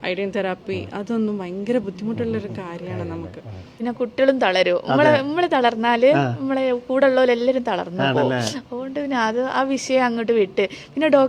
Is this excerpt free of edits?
no; 1 cut; at 3.7 s

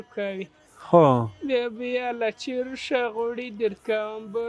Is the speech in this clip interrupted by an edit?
no; 0 cuts

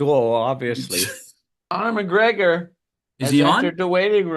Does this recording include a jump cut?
yes; 1 cut; at 1.6 s

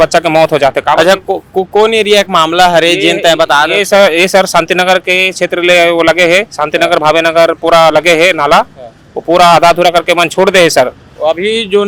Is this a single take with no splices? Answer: yes; 0 cuts

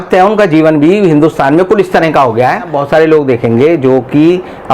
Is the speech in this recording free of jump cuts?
no; 1 cut; at 2.8 s

